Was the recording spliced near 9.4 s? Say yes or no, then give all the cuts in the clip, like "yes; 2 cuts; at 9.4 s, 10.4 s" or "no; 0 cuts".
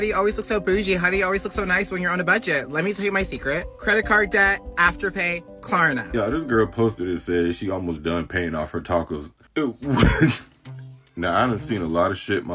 yes; 2 cuts; at 6.1 s, 9.4 s